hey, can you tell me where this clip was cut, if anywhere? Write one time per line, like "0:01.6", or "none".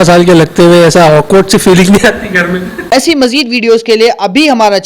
0:02.7